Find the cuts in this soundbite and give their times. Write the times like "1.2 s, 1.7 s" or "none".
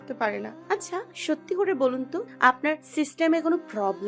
1.1 s, 2.6 s

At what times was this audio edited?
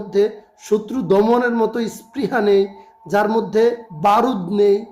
3.9 s

